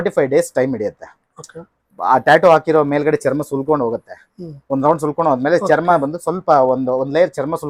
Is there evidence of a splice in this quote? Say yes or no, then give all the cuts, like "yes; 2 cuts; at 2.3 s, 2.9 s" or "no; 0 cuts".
no; 0 cuts